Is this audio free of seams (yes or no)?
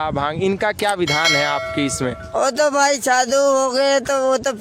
yes